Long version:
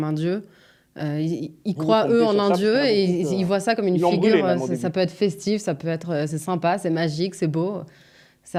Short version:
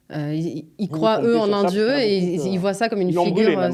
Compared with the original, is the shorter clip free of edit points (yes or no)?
yes